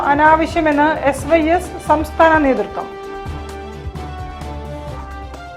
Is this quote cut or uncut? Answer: uncut